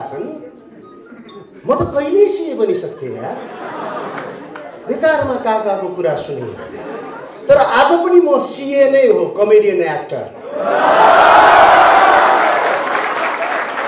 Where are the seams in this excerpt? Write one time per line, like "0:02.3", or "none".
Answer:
none